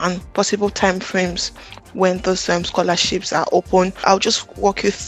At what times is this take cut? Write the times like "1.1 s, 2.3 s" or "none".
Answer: 4.0 s